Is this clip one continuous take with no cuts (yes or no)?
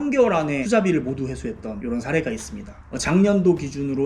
no